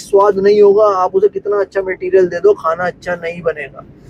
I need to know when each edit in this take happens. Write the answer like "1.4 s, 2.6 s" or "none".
none